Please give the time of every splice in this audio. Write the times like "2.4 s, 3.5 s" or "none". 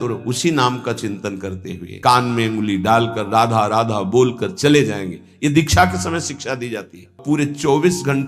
1.9 s, 7.2 s